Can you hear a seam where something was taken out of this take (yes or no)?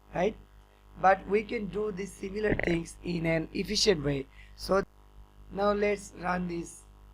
yes